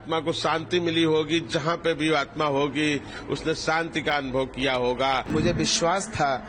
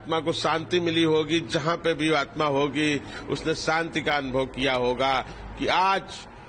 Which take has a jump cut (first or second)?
first